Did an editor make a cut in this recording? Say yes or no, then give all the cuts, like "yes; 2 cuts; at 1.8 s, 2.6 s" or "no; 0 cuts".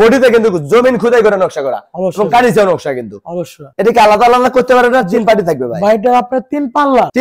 no; 0 cuts